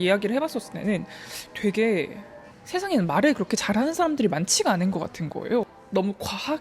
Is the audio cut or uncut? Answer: cut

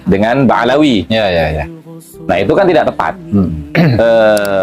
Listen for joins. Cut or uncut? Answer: cut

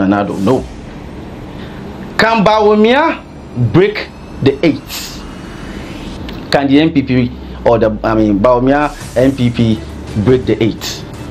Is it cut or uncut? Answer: cut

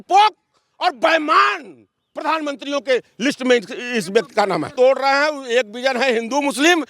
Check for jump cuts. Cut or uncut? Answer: cut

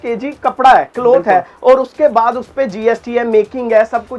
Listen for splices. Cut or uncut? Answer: uncut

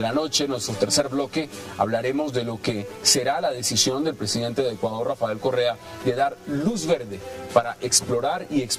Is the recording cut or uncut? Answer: cut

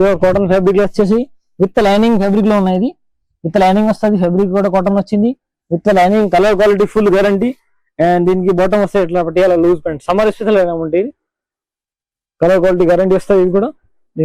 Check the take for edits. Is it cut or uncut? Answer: uncut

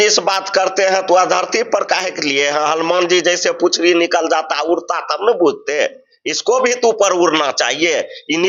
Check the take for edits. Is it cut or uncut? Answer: uncut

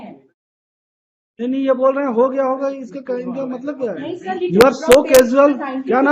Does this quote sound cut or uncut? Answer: cut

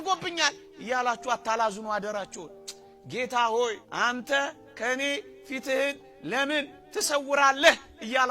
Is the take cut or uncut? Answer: cut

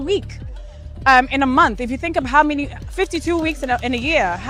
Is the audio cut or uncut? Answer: uncut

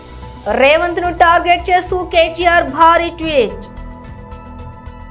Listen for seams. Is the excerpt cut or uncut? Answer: uncut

